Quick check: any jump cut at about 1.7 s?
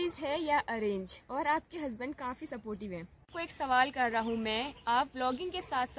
no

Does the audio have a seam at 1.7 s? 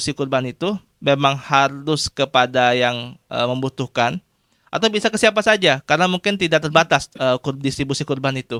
no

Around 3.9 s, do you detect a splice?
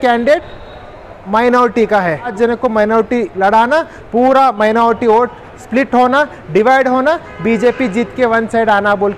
no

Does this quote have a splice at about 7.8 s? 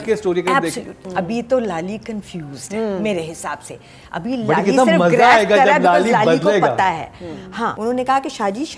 yes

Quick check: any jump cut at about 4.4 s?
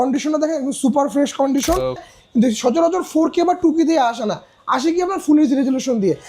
no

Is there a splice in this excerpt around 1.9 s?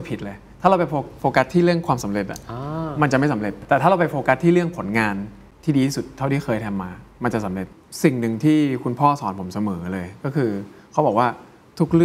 no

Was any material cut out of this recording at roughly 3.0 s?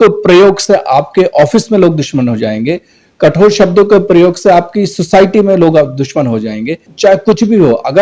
no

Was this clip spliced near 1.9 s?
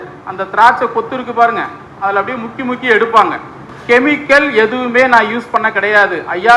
no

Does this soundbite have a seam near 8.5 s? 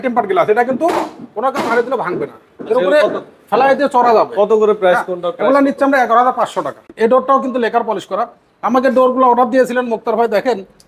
no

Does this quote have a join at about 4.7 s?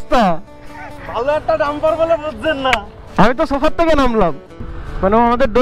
yes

